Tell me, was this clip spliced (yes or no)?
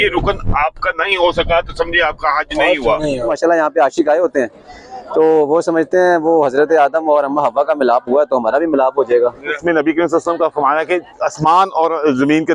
yes